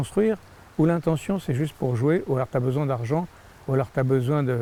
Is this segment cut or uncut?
uncut